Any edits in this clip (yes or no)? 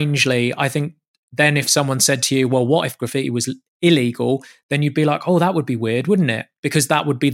no